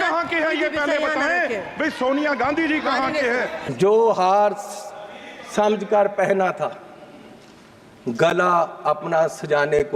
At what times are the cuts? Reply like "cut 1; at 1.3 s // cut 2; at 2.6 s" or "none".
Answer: cut 1; at 3.6 s